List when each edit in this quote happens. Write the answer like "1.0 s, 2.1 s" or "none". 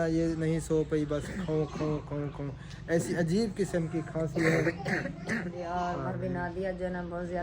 5.5 s